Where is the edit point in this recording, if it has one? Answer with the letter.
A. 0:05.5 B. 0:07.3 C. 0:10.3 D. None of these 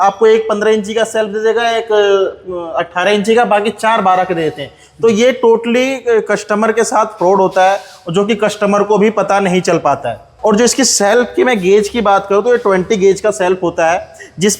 C